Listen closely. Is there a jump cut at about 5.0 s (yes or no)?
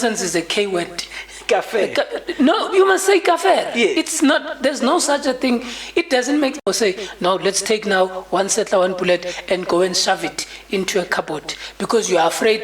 no